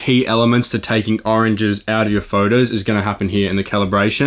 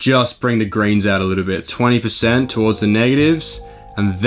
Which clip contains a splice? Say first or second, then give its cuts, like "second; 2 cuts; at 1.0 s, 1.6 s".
second; 1 cut; at 1.7 s